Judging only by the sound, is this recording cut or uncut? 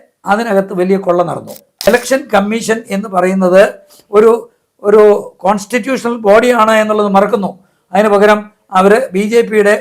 cut